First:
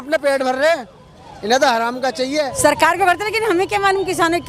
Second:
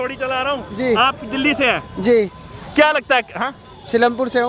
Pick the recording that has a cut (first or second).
first